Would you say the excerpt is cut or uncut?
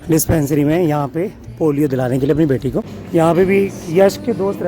cut